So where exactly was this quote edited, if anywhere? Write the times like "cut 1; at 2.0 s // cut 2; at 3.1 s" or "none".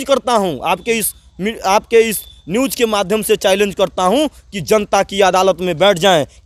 none

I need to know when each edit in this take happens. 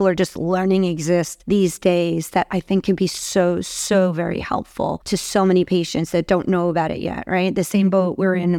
cut 1; at 1.3 s // cut 2; at 5.0 s

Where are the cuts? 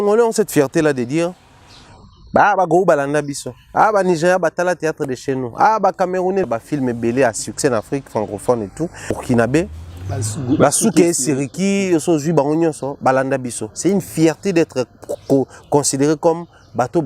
cut 1; at 6.5 s // cut 2; at 9.1 s

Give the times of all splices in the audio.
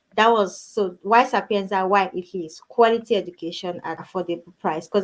cut 1; at 4.0 s

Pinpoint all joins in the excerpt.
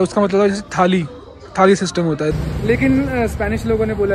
cut 1; at 2.3 s

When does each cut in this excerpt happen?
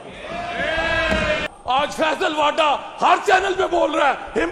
cut 1; at 1.4 s

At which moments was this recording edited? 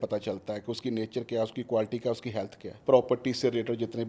cut 1; at 2.6 s

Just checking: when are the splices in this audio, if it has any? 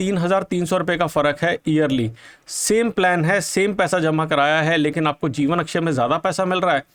none

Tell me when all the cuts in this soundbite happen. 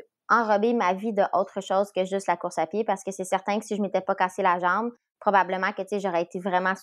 none

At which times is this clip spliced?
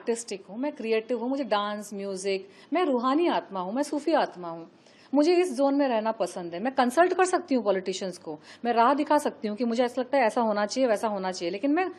none

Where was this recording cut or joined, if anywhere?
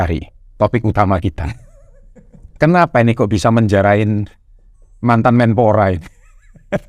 none

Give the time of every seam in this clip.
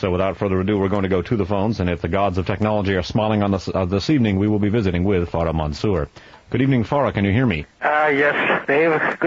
none

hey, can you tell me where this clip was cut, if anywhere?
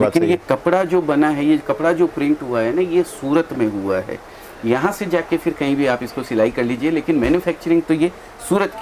none

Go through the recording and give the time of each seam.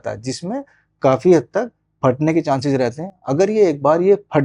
none

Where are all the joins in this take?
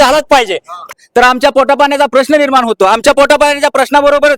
cut 1; at 0.9 s

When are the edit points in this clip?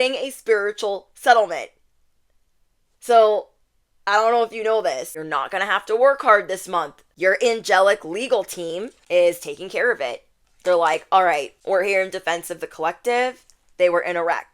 cut 1; at 5.2 s // cut 2; at 7.0 s // cut 3; at 9.0 s // cut 4; at 11.5 s

